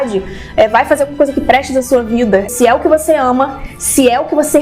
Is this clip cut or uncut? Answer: cut